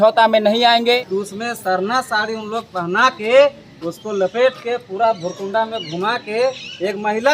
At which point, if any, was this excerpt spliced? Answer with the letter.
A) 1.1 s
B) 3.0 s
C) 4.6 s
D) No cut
A